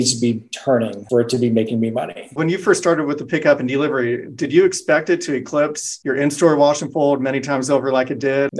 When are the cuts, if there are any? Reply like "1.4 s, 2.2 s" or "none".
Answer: 2.2 s